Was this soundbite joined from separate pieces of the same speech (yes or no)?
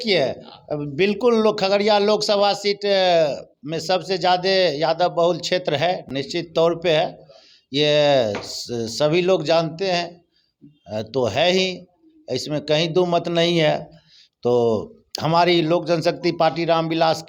no